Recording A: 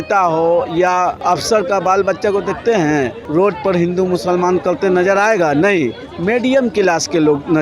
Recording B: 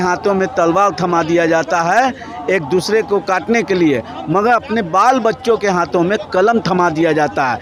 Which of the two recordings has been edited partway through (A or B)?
A